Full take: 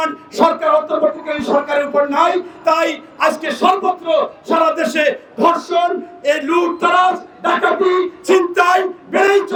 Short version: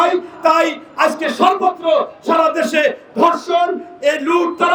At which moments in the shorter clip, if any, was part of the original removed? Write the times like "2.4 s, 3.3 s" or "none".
none